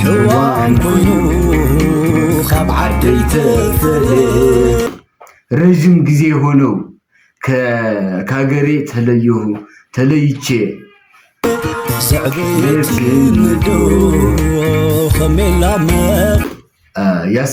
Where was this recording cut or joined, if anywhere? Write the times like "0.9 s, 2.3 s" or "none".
none